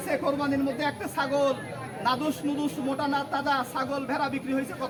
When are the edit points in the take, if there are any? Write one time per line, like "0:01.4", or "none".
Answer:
none

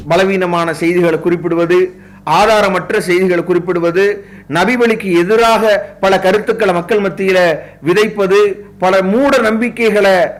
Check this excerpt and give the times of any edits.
none

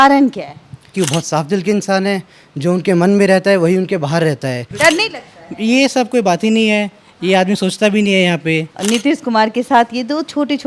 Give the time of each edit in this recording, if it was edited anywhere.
0:00.9
0:04.7
0:08.7

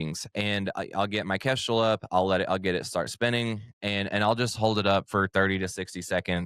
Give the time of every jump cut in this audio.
none

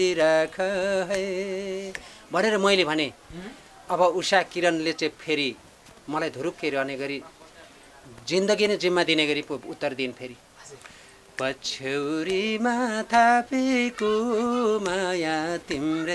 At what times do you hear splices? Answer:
none

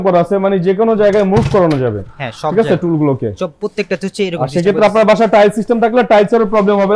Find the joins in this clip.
none

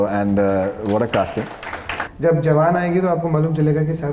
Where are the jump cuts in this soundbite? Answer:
0:02.0

